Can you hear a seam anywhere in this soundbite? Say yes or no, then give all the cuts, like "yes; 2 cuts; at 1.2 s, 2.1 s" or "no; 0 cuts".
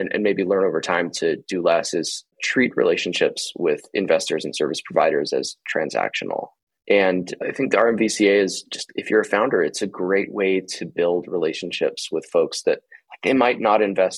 yes; 1 cut; at 2.4 s